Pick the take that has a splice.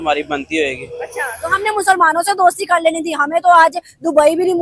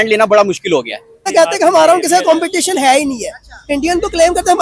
second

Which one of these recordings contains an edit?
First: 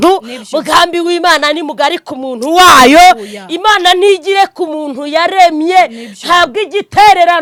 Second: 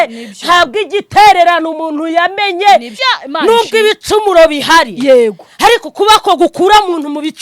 second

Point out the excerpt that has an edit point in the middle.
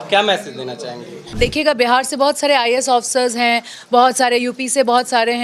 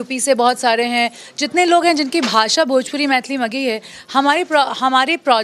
first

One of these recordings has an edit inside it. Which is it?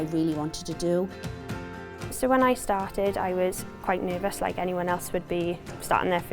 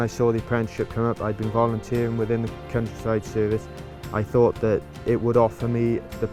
first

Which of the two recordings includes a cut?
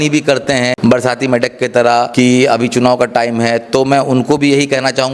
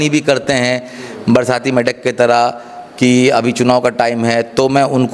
first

